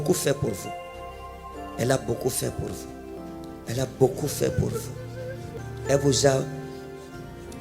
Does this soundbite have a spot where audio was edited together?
yes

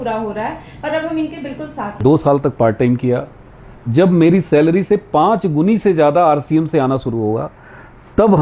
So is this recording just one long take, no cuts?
no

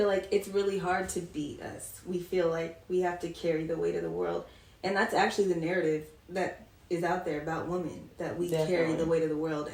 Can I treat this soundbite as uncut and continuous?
yes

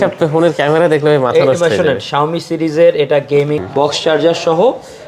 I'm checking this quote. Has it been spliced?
yes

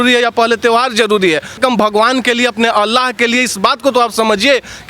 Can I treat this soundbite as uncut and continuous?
no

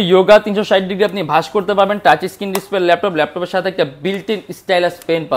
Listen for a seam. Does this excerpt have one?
no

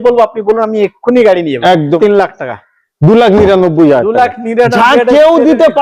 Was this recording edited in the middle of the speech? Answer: yes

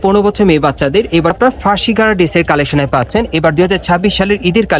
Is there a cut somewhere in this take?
yes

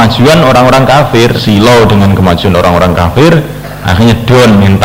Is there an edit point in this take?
yes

